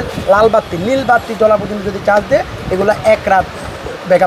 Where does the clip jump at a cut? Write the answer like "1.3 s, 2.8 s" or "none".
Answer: none